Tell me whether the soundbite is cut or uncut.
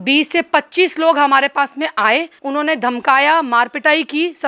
cut